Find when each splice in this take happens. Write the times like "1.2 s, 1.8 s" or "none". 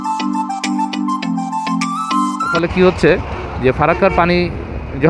2.5 s